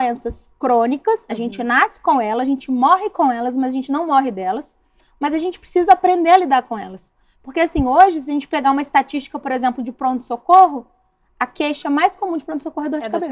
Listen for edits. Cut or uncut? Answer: uncut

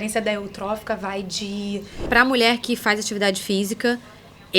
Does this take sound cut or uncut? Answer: cut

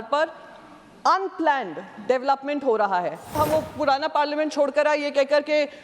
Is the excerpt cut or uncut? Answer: cut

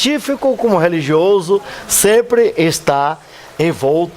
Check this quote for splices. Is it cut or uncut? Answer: cut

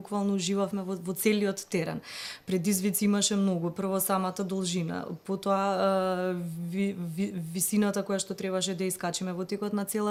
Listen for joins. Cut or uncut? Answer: uncut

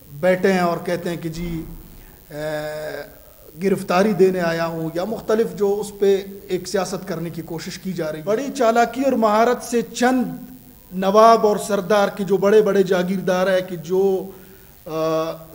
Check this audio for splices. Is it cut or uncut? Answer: cut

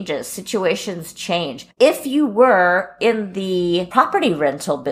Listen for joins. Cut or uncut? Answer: uncut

